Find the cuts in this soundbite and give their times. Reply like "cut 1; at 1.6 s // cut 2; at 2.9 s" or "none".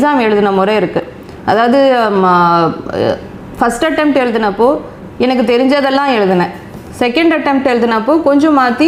none